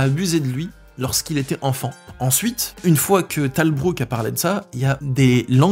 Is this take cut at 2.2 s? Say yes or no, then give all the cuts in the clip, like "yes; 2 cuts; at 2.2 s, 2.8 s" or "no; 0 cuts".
no; 0 cuts